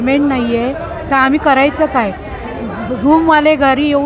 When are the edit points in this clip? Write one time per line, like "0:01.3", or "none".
none